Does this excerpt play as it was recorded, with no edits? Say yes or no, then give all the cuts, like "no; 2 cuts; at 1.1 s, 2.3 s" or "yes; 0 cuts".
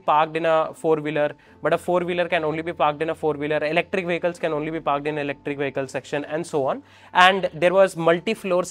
yes; 0 cuts